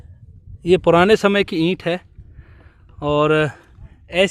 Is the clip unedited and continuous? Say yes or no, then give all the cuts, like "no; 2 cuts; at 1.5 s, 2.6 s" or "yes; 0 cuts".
yes; 0 cuts